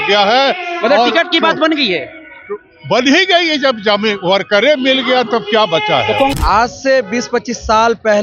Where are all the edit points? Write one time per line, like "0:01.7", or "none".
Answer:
0:06.3